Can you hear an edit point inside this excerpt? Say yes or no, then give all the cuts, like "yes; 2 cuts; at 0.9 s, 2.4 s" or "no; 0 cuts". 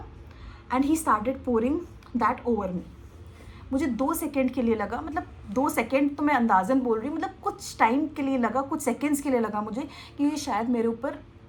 no; 0 cuts